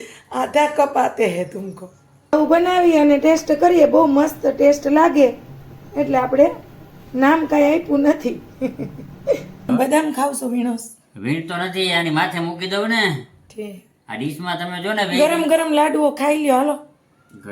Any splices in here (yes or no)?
yes